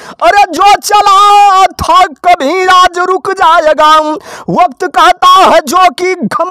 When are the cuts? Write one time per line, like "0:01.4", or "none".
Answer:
none